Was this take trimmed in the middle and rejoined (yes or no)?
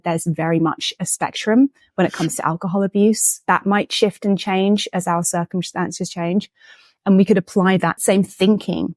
yes